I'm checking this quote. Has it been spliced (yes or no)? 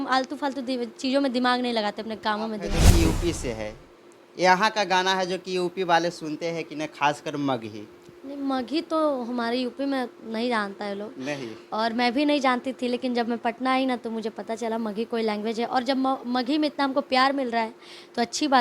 yes